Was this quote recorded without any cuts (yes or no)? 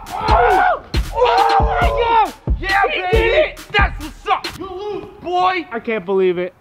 yes